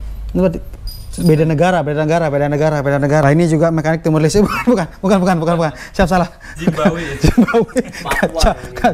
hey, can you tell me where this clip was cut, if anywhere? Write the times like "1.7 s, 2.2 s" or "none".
3.2 s